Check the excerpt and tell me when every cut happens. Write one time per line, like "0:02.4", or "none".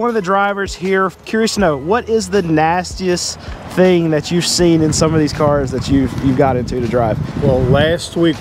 0:01.2